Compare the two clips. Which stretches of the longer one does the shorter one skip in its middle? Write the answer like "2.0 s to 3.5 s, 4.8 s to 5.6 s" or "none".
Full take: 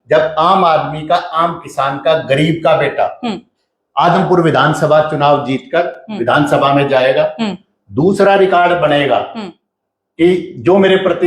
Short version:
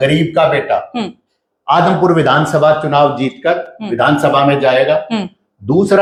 none